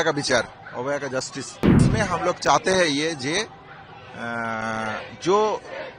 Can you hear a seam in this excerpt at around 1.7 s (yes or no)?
yes